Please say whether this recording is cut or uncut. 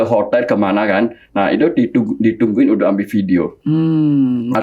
uncut